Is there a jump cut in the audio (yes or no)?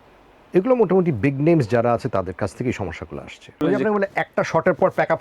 yes